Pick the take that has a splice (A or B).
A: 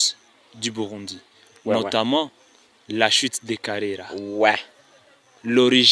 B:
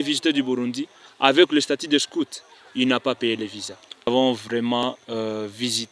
B